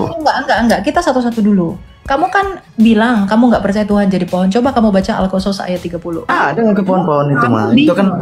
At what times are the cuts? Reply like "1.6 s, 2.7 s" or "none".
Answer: 6.3 s